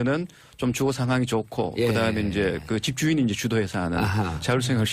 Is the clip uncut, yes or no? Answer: no